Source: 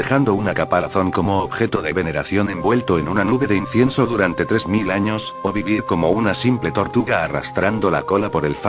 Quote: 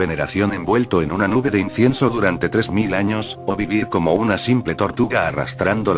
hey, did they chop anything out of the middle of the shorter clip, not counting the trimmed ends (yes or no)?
no